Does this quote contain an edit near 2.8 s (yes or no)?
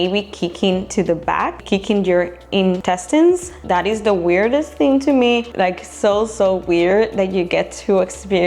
yes